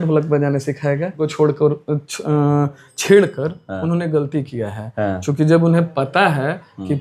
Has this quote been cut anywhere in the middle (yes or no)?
yes